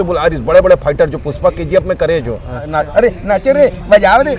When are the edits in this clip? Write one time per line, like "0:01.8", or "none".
0:02.7